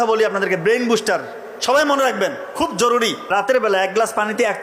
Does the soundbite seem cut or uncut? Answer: cut